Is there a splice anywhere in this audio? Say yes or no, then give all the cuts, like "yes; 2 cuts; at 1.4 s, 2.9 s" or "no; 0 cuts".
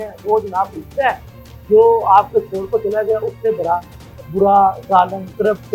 no; 0 cuts